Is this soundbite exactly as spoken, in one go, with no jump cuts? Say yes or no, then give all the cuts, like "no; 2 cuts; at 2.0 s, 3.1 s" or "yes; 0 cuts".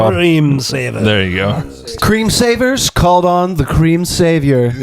no; 1 cut; at 1.6 s